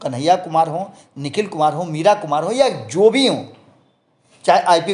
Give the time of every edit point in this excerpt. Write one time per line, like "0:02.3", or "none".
none